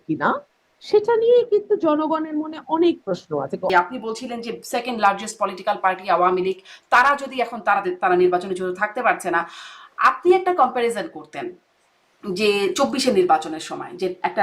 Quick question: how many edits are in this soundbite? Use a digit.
1